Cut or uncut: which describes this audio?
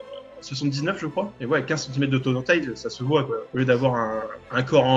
uncut